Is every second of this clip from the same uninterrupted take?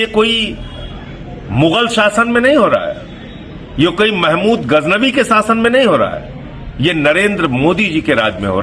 yes; 0 cuts

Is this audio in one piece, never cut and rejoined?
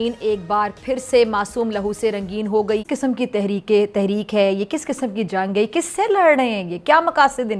no; 1 cut; at 2.8 s

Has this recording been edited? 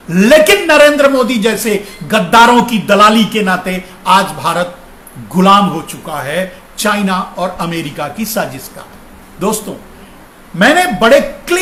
no; 0 cuts

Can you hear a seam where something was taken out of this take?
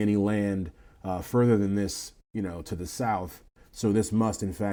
no; 0 cuts

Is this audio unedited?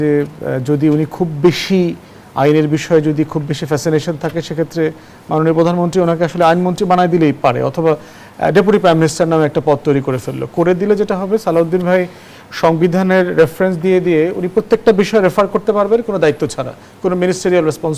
yes; 0 cuts

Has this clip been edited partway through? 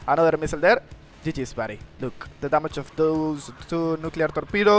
yes; 1 cut; at 1.8 s

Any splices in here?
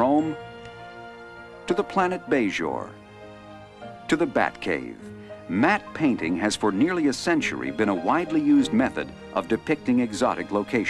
yes; 1 cut; at 9.6 s

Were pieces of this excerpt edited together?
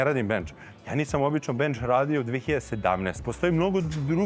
yes; 1 cut; at 3.2 s

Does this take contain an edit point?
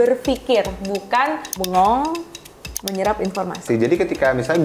yes; 2 cuts; at 1.5 s, 3.6 s

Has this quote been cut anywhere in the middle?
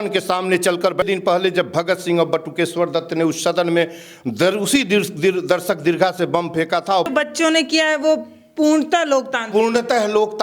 yes; 2 cuts; at 1.0 s, 7.1 s

